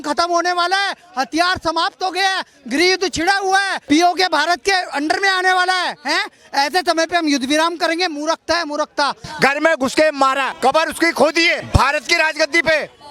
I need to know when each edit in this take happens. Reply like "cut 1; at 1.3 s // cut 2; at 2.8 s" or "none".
cut 1; at 3.7 s // cut 2; at 9.3 s // cut 3; at 10.5 s // cut 4; at 11.6 s